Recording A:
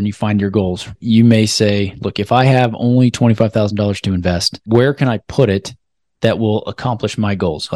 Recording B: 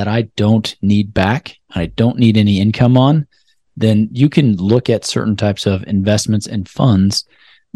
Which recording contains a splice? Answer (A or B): A